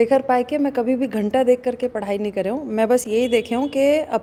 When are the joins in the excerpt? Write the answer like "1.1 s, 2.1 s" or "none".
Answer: none